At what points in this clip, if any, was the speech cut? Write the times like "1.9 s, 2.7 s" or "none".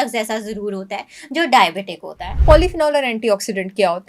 2.3 s